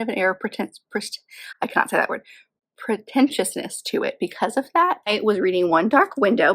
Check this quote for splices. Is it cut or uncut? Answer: cut